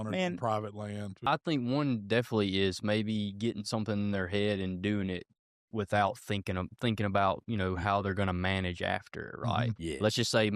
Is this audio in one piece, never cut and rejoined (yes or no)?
no